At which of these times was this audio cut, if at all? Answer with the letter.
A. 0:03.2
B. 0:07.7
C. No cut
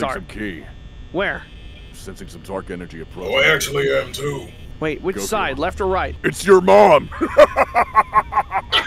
C